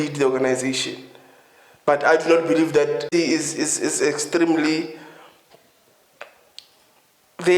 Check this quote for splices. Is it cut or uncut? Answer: cut